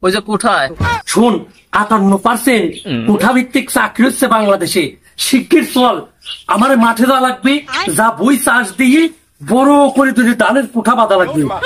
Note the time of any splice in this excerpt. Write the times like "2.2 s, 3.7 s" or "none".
0.9 s